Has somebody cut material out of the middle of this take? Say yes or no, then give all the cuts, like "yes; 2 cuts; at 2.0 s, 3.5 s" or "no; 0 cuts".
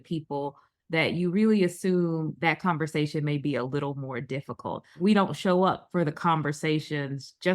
yes; 1 cut; at 5.0 s